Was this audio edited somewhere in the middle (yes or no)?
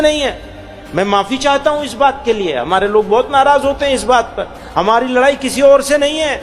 no